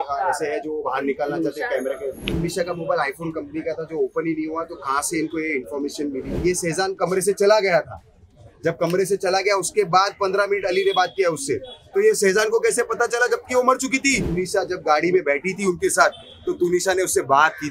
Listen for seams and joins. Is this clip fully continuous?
no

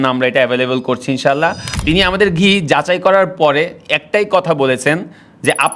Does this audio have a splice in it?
yes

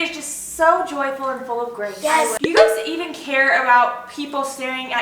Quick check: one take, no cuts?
no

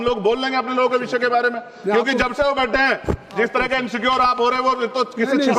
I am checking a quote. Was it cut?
no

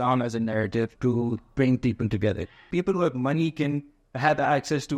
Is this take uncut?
no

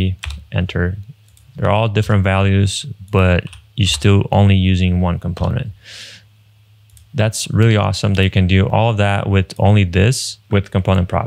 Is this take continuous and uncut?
no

